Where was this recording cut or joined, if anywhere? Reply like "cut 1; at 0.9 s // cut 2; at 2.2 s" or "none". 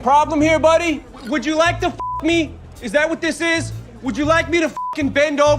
cut 1; at 1.1 s // cut 2; at 3.8 s